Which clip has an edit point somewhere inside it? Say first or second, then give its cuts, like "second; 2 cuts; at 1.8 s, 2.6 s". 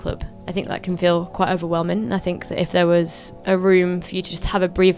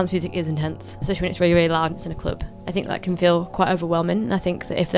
second; 1 cut; at 1.0 s